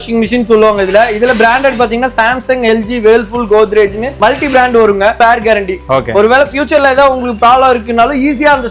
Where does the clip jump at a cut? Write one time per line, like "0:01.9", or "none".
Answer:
0:05.1